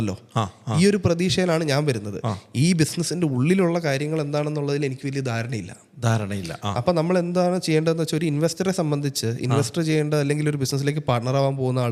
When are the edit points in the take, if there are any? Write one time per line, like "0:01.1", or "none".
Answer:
none